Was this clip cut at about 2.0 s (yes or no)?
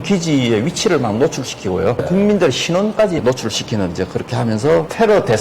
yes